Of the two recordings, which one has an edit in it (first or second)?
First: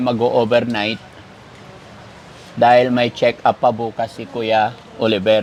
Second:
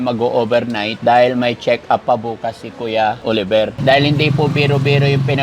second